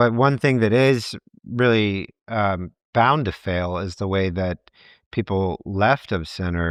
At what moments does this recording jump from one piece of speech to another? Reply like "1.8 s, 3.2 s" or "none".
none